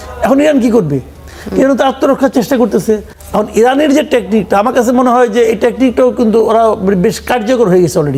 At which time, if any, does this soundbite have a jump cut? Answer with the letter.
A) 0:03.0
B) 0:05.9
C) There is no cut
C